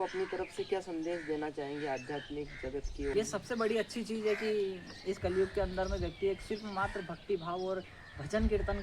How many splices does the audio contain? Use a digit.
1